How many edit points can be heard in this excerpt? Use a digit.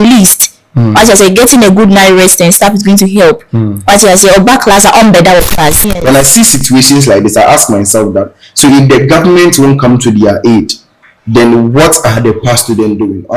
1